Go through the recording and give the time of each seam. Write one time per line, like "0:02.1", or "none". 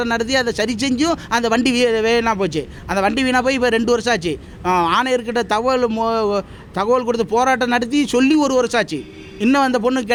none